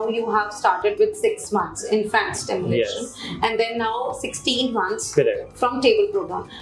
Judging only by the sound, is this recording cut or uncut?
uncut